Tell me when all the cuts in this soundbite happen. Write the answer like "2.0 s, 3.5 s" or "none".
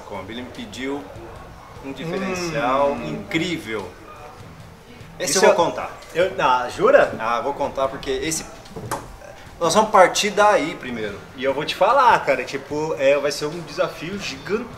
none